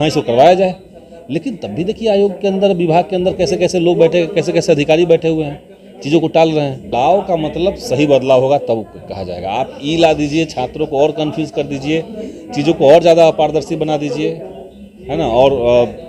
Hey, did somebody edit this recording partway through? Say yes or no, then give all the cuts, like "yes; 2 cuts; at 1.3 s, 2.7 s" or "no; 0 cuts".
yes; 1 cut; at 6.9 s